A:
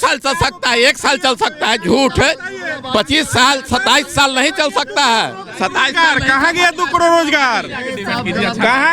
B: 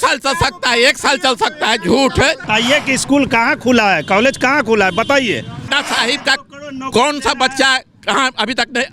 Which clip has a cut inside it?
B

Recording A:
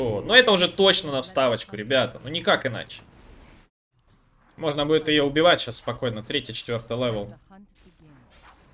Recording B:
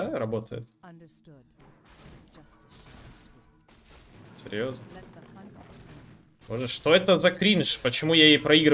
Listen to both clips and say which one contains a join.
A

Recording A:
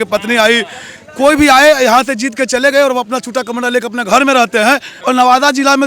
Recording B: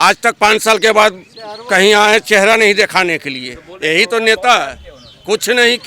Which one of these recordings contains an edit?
A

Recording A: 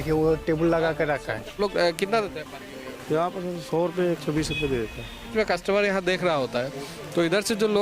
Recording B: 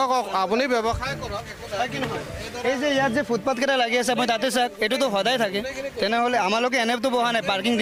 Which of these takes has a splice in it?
A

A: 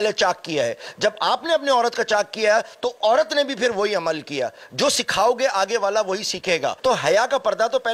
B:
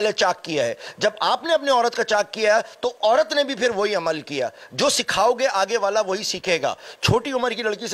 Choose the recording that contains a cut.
A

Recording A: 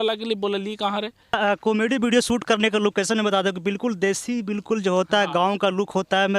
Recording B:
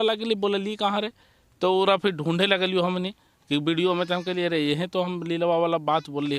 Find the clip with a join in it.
A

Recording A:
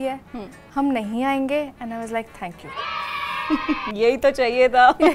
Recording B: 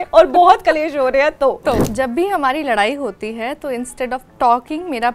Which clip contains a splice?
B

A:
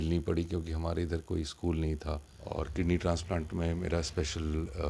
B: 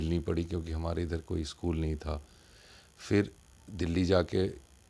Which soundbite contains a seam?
A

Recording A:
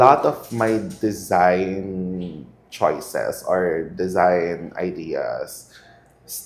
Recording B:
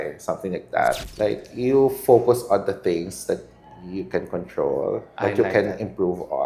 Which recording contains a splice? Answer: B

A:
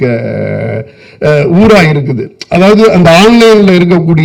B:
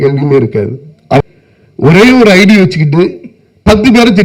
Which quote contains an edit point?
B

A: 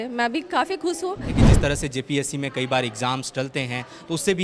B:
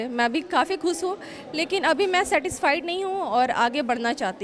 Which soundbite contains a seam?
A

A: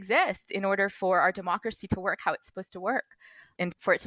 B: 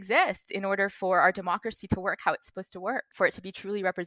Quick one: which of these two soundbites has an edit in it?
B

